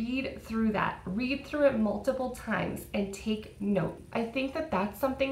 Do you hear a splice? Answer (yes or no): yes